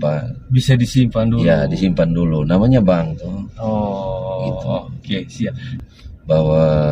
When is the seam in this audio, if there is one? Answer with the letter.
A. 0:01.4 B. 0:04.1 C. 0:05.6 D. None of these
C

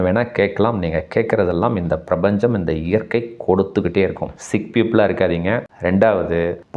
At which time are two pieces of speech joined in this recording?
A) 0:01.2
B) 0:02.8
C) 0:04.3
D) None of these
C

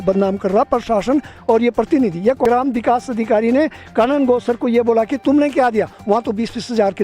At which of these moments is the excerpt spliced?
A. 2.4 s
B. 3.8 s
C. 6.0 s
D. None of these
A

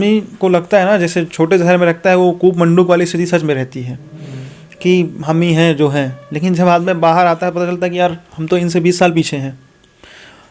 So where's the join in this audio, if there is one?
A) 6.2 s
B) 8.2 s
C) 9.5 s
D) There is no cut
D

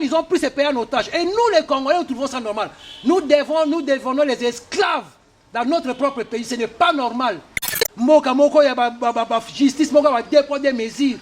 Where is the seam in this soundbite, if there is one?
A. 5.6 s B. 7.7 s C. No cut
B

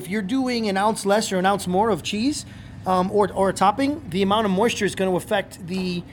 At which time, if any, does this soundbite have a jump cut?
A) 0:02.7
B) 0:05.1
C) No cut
C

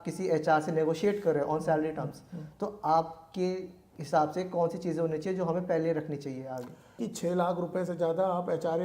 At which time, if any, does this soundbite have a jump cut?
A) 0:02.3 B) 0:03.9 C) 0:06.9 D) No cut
C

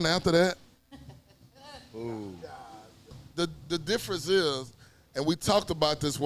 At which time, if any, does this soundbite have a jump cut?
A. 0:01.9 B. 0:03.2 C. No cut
B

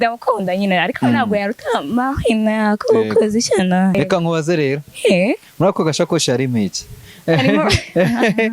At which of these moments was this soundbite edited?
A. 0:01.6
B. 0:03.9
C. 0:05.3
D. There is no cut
B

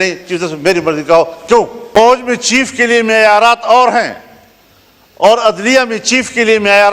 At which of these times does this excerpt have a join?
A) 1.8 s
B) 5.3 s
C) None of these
A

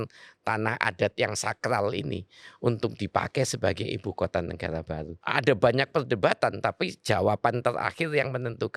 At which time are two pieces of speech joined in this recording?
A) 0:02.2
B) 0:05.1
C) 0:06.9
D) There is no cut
B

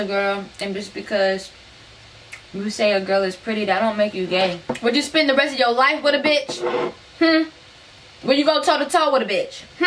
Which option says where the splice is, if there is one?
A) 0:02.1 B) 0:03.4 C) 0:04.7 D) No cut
C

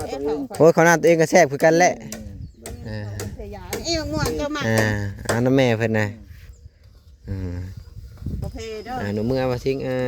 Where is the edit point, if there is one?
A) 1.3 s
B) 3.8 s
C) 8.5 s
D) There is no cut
C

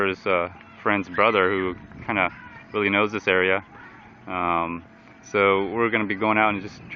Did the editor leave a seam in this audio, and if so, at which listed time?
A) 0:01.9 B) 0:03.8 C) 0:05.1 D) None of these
C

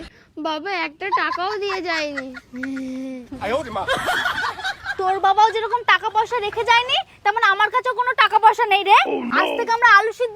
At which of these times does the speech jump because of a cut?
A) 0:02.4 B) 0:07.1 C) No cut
C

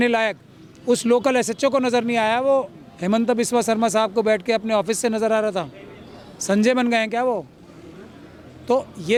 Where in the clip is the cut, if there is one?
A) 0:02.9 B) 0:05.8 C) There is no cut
C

